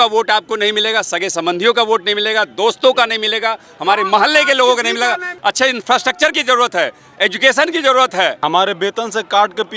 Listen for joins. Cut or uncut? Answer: cut